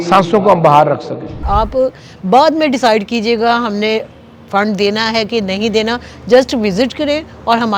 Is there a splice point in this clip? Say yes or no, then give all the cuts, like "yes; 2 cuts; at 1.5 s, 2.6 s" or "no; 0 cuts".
yes; 1 cut; at 1.3 s